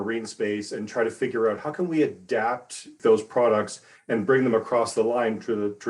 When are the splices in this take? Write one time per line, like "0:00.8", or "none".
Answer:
0:03.0